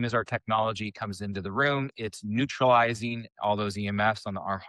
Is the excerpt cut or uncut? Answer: uncut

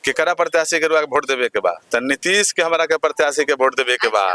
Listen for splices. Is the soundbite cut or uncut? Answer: uncut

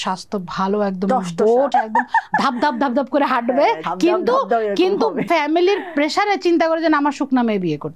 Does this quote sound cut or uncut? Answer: cut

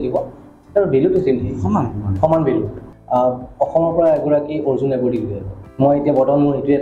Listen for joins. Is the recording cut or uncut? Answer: cut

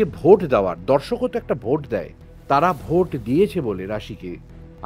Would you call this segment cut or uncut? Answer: uncut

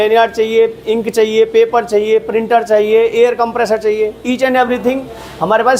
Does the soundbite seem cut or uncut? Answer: uncut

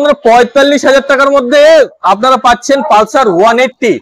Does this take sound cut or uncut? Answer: uncut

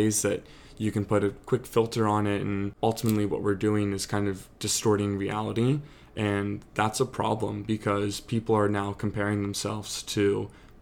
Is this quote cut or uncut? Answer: cut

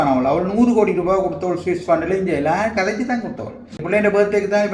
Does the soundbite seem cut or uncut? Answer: cut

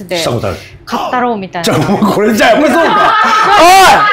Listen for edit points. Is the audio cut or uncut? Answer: uncut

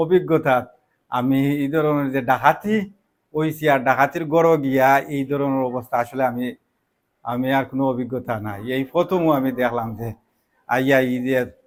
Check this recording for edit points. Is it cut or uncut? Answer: uncut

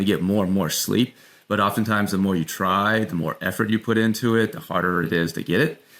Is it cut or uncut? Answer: uncut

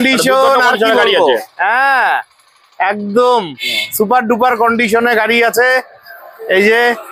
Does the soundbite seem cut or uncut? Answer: uncut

